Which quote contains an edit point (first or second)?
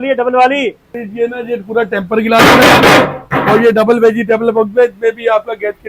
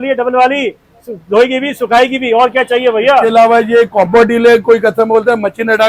first